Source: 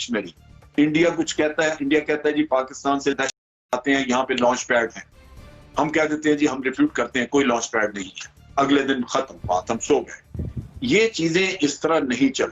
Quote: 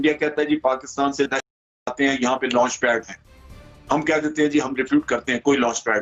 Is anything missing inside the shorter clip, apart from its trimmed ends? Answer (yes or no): no